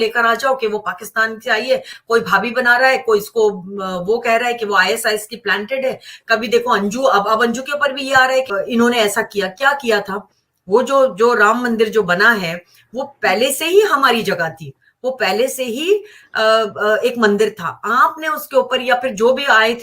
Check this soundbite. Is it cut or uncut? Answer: cut